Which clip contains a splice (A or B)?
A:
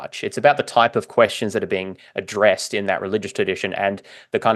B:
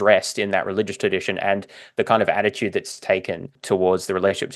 B